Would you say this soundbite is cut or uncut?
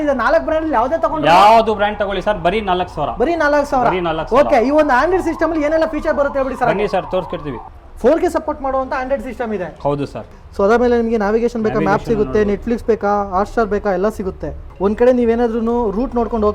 uncut